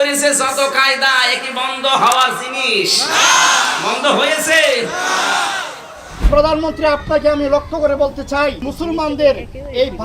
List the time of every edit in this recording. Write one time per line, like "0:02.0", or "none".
0:06.3
0:08.7